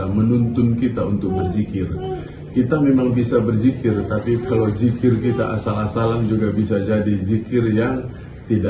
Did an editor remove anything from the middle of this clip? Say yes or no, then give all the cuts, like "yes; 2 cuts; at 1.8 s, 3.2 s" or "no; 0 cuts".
no; 0 cuts